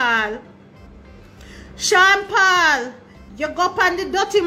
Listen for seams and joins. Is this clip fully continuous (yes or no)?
yes